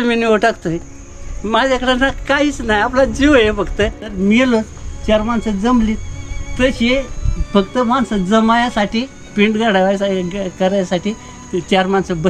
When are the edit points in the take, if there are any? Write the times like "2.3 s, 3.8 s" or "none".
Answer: 4.0 s